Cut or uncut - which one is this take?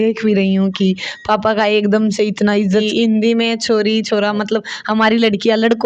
cut